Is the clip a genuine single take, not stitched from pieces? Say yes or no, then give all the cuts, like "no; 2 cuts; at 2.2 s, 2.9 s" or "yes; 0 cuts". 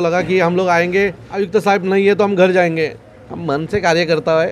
no; 1 cut; at 1.2 s